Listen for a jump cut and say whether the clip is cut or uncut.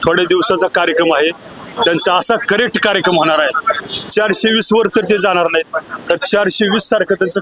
uncut